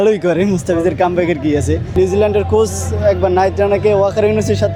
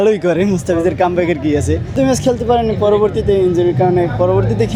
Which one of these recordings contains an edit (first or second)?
first